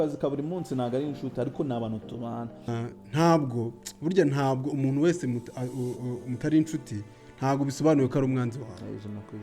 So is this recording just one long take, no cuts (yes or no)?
no